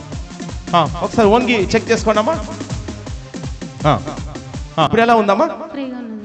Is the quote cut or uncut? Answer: cut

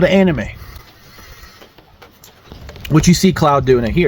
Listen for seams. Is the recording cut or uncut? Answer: cut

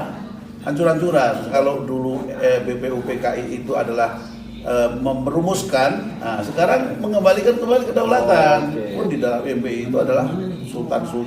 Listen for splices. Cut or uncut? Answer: cut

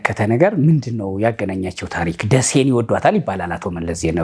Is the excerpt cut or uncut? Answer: uncut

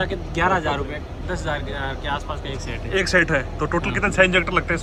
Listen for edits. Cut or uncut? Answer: uncut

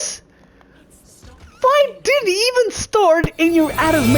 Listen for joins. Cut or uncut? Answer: uncut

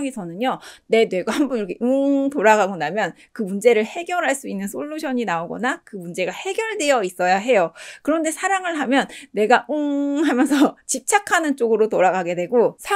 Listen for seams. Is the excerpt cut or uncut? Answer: uncut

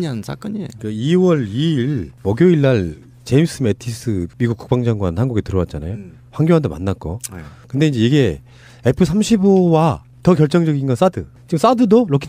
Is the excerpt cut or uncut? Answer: cut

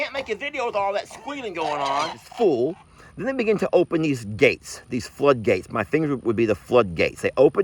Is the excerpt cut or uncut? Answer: cut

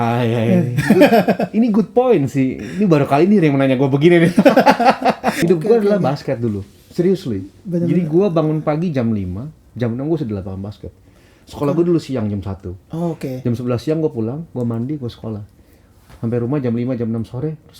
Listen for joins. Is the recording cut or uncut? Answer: cut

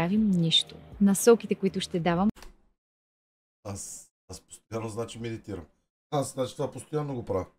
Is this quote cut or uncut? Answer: uncut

